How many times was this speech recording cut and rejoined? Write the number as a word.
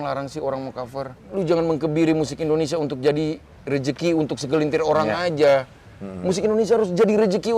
one